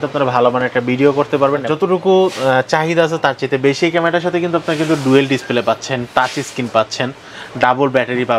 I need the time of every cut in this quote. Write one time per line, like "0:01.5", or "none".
0:01.7